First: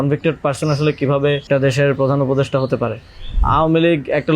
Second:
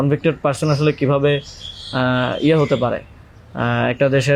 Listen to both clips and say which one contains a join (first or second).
first